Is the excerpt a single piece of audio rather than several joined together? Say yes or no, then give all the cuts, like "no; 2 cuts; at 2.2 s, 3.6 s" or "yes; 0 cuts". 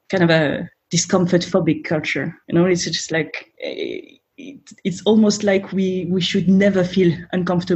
no; 2 cuts; at 2.5 s, 3.4 s